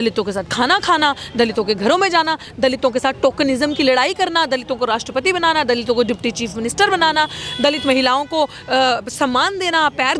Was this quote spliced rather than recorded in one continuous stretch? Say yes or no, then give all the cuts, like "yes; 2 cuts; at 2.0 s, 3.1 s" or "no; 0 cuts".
no; 0 cuts